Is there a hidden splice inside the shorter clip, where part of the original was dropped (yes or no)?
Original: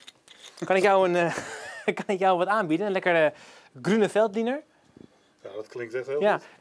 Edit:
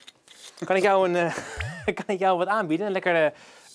no